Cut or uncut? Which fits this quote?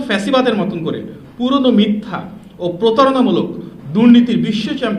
uncut